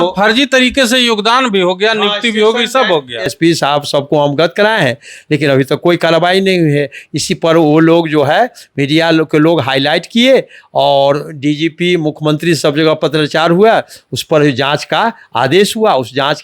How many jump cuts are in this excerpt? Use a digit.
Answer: 0